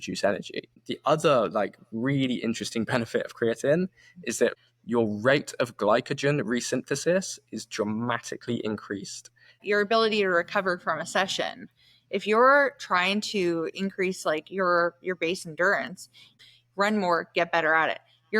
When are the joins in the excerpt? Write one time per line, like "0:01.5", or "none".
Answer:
0:00.9
0:04.7
0:09.6
0:16.3